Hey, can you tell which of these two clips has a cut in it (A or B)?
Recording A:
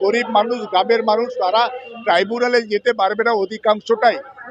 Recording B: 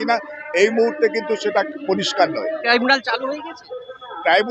B